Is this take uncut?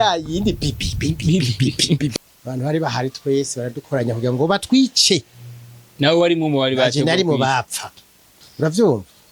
no; 1 cut; at 2.2 s

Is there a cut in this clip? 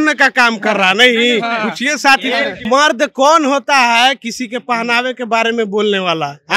yes; 1 cut; at 2.6 s

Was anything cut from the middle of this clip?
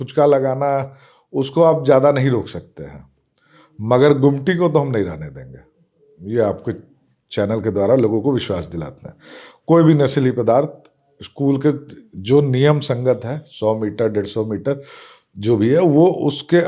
no; 0 cuts

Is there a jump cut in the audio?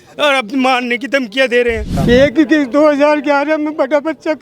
yes; 1 cut; at 1.9 s

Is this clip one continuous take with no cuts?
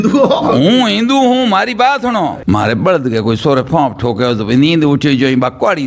no; 1 cut; at 2.4 s

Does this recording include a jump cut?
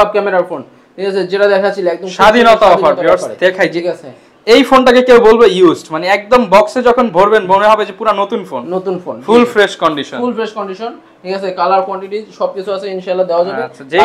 no; 0 cuts

